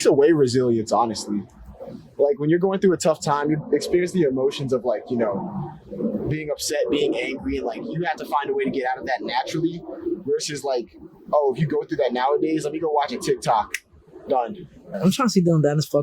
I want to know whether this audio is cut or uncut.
cut